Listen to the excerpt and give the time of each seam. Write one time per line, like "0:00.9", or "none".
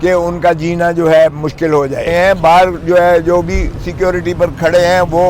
0:02.0